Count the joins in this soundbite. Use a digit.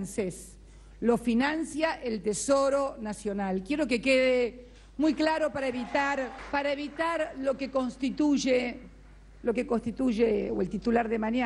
1